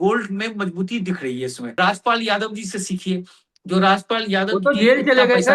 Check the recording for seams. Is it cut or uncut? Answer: cut